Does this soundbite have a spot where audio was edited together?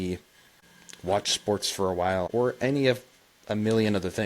yes; 1 cut; at 2.3 s

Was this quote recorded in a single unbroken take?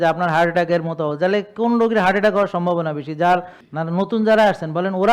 no; 1 cut; at 3.4 s

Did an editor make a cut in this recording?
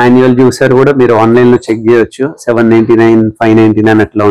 no; 0 cuts

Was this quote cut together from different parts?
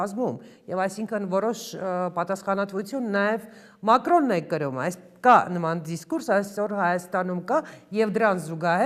no; 0 cuts

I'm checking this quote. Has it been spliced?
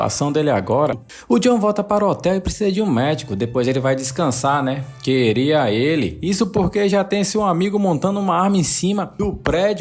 yes; 1 cut; at 1.1 s

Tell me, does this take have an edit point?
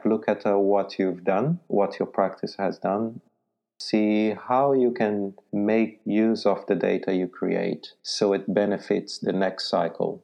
no; 0 cuts

